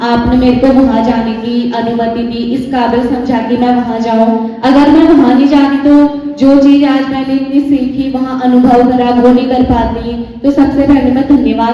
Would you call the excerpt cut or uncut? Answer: uncut